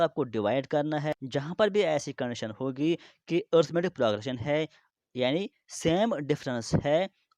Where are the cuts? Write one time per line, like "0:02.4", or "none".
0:01.1

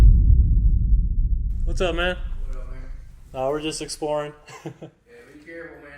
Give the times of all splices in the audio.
0:01.3

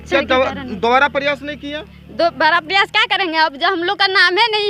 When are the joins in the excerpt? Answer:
none

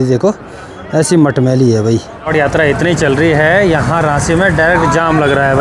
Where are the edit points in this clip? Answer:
0:02.3

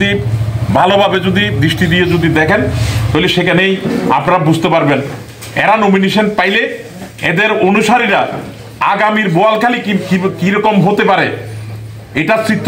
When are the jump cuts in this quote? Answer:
none

